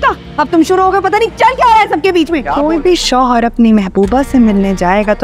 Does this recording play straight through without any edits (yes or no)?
no